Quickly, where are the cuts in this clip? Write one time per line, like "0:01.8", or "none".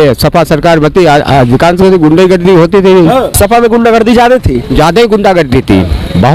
0:03.3